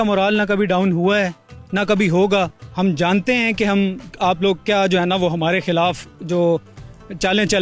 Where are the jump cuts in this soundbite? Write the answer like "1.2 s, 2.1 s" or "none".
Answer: 2.6 s